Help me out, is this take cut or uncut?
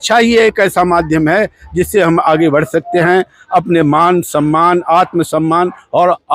uncut